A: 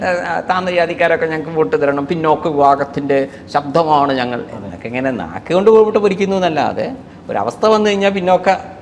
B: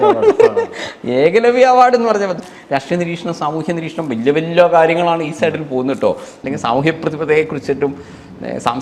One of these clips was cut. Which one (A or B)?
B